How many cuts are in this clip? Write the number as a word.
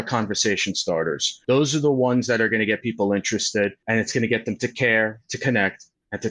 two